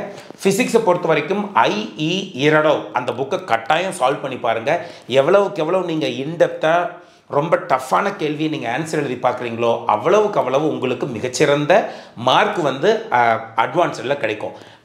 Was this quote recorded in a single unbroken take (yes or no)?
yes